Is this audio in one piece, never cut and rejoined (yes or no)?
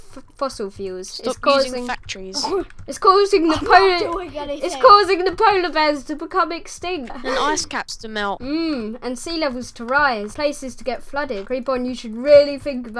no